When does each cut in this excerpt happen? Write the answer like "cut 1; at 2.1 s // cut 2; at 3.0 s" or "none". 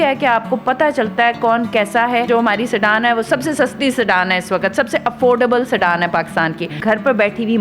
cut 1; at 2.3 s // cut 2; at 6.7 s